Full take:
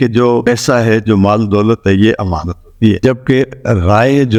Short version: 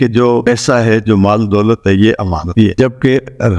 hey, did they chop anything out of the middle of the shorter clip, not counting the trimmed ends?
yes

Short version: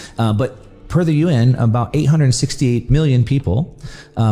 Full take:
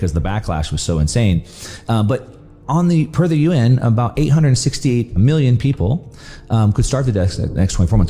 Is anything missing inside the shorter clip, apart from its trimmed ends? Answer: yes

